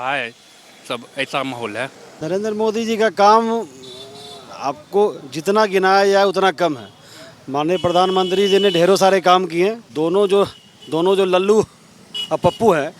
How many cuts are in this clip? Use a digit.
2